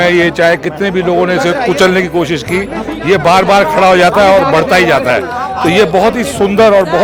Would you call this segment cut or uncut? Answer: uncut